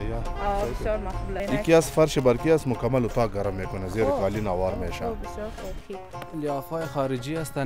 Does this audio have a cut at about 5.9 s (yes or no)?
yes